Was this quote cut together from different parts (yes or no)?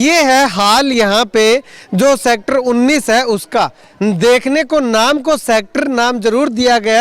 no